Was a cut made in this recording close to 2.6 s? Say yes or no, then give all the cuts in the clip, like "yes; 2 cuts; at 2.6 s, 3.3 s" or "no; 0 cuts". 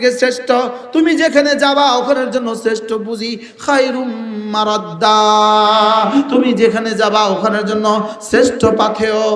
no; 0 cuts